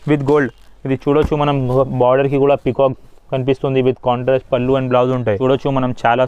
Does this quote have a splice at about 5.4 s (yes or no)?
yes